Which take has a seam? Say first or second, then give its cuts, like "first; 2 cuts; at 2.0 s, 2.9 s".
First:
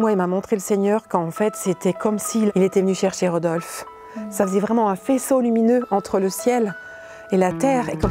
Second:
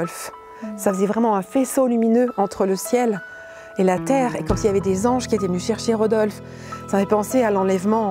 first; 1 cut; at 2.5 s